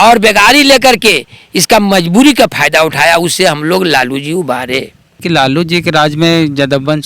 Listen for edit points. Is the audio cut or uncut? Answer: cut